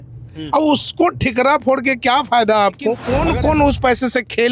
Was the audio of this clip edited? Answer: yes; 1 cut; at 3.1 s

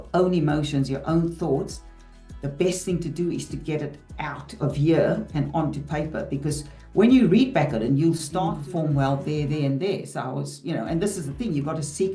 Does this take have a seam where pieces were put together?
yes; 1 cut; at 8.3 s

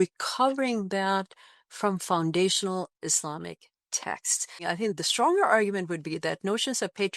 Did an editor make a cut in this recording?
yes; 1 cut; at 4.6 s

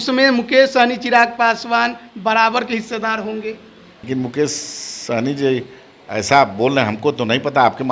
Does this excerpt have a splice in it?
yes; 1 cut; at 3.9 s

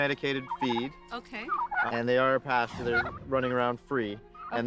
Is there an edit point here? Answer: yes; 1 cut; at 1.8 s

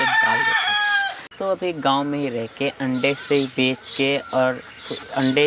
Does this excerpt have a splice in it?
yes; 1 cut; at 1.2 s

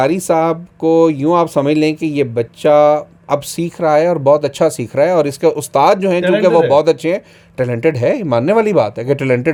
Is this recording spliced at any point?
no; 0 cuts

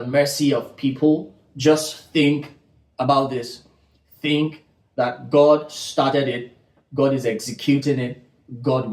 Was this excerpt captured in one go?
yes; 0 cuts

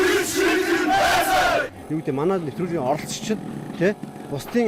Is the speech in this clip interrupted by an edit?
yes; 1 cut; at 1.8 s

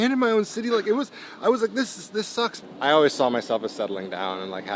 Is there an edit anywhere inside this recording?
yes; 1 cut; at 2.6 s

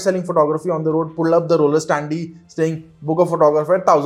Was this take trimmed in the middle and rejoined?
no; 0 cuts

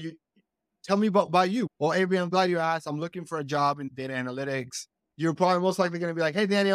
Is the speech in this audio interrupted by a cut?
yes; 3 cuts; at 1.7 s, 3.9 s, 5.1 s

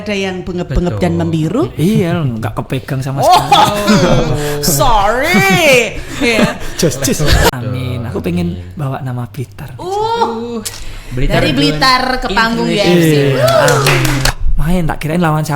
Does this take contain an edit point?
yes; 2 cuts; at 7.5 s, 14.3 s

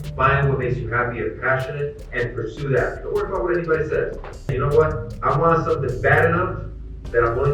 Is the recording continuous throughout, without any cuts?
no; 1 cut; at 4.5 s

